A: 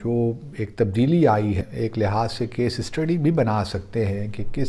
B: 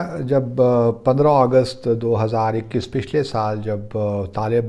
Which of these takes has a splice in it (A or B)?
A